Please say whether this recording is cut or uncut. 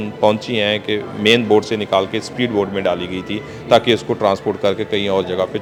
uncut